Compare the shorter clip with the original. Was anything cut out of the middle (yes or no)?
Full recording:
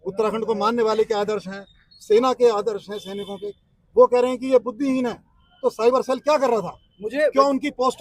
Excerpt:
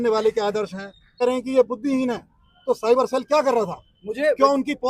yes